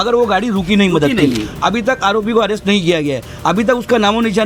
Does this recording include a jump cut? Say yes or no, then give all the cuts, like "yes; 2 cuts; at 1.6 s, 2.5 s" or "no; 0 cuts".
yes; 1 cut; at 1.4 s